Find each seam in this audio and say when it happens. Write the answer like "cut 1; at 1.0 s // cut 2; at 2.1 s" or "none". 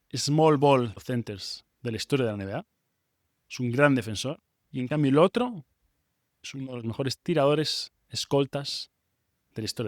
cut 1; at 1.0 s